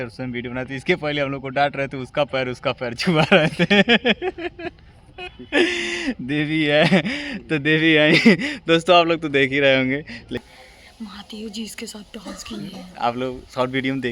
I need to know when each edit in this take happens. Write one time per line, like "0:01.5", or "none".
0:10.4